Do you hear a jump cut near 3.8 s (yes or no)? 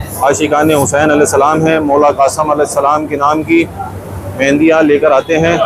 no